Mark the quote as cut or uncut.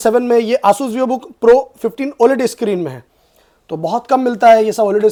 uncut